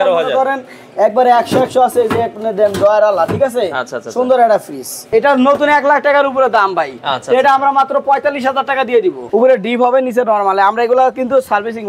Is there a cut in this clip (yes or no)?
yes